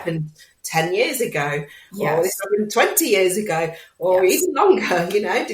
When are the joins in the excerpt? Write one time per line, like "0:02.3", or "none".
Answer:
none